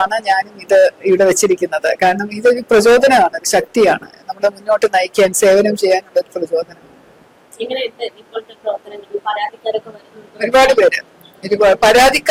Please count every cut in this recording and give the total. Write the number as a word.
zero